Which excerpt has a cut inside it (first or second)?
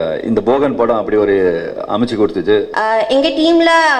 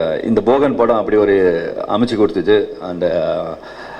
first